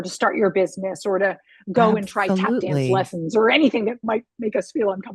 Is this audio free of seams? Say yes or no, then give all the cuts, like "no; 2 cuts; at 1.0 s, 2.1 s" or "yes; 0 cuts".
no; 1 cut; at 4.0 s